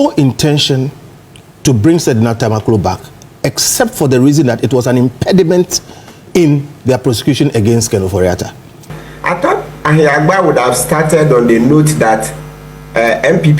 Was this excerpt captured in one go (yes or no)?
no